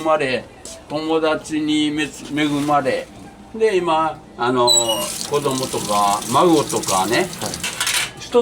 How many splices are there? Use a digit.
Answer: 0